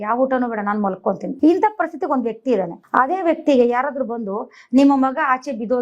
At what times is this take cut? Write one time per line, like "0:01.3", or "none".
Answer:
0:01.3
0:02.8